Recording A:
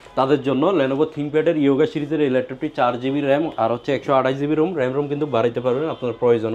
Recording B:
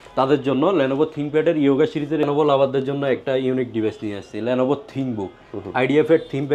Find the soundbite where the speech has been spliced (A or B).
B